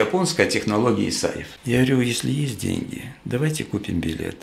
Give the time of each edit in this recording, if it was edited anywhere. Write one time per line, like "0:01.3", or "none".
0:01.5